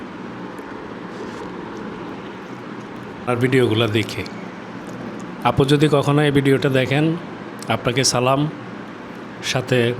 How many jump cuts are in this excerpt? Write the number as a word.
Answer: one